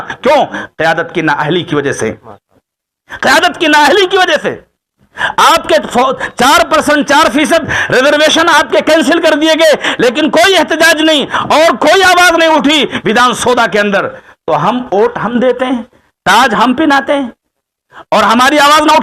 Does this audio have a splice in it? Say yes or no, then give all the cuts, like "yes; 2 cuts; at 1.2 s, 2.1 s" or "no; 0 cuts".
no; 0 cuts